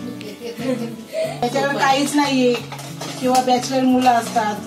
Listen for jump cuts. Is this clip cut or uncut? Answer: cut